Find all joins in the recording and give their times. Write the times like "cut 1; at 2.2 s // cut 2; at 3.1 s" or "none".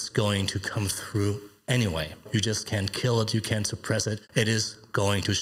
cut 1; at 2.2 s // cut 2; at 4.2 s